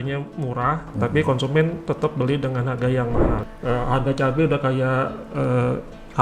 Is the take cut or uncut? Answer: cut